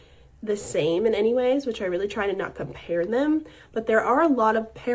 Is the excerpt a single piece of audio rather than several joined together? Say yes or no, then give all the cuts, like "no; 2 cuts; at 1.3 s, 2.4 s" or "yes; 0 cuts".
no; 2 cuts; at 1.7 s, 3.6 s